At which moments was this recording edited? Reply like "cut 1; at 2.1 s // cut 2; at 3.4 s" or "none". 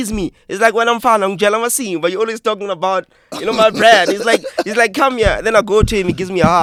none